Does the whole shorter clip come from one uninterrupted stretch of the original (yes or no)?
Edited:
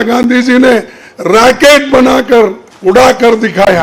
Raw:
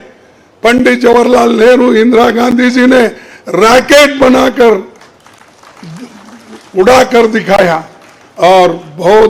no